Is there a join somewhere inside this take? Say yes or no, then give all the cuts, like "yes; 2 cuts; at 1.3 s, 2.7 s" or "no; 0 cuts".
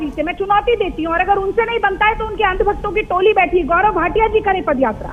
no; 0 cuts